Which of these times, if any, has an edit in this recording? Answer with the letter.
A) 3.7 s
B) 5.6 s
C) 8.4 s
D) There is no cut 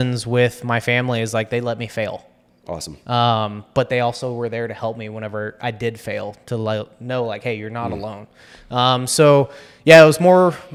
D